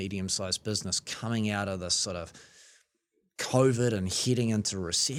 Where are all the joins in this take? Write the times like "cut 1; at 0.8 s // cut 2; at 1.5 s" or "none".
none